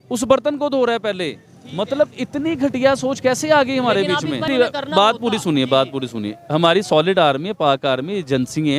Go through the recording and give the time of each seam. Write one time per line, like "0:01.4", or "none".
0:04.5